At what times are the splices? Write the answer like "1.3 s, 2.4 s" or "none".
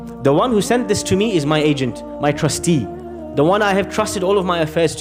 none